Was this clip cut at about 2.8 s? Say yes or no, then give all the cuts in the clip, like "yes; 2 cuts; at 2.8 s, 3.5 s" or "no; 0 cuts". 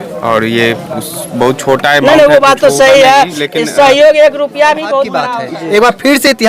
no; 1 cut; at 5.2 s